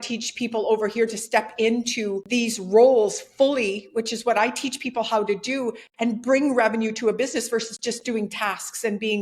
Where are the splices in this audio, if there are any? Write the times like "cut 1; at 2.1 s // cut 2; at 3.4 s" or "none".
none